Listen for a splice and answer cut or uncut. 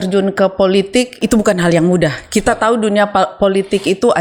uncut